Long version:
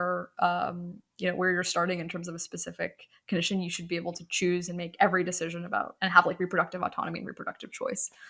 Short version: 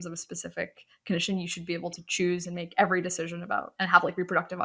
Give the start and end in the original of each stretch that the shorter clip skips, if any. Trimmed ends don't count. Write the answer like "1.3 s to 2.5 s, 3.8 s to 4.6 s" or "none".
none